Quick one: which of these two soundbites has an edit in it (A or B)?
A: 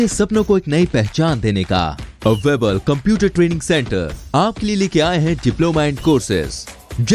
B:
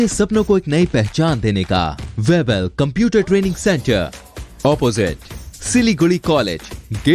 B